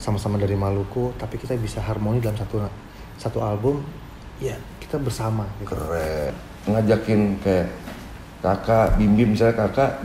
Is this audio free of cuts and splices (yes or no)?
no